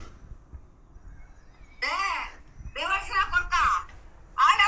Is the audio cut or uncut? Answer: uncut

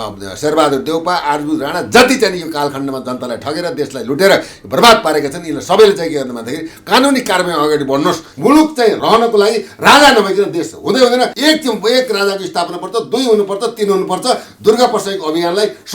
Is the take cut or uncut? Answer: cut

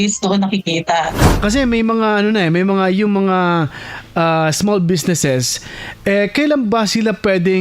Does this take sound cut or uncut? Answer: cut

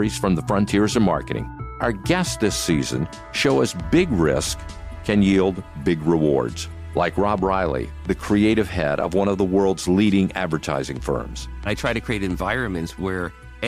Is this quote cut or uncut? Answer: cut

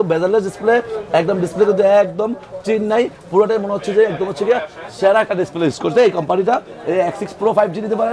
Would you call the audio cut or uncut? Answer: uncut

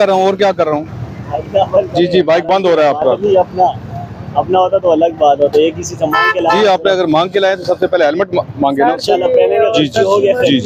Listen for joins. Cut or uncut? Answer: uncut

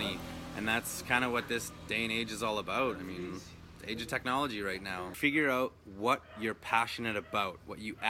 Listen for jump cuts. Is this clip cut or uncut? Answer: cut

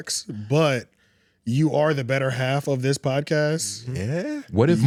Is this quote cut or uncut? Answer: uncut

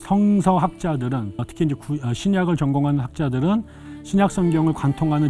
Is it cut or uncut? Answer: cut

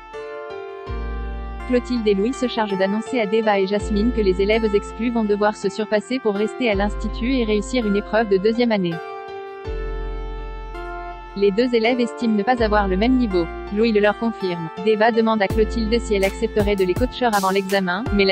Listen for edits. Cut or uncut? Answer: cut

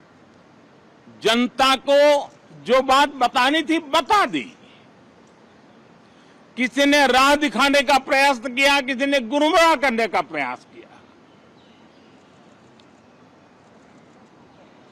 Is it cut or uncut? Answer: uncut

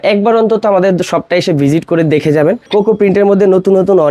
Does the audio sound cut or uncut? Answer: cut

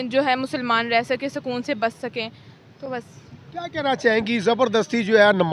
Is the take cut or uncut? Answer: uncut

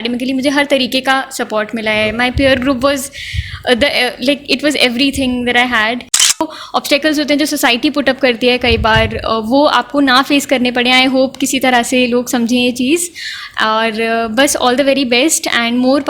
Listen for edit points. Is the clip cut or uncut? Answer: cut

